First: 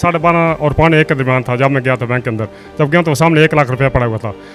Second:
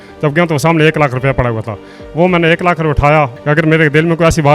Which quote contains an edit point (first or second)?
second